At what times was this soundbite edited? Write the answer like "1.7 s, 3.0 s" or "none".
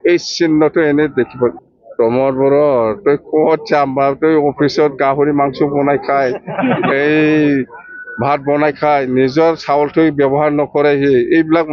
1.7 s